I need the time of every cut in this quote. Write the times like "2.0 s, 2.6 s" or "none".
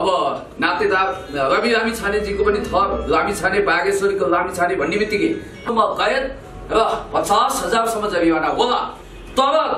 5.7 s